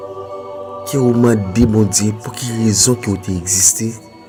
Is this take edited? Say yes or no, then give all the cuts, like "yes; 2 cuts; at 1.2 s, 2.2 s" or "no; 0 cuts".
no; 0 cuts